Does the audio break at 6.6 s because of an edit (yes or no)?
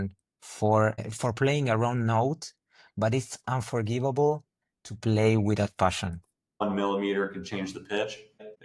yes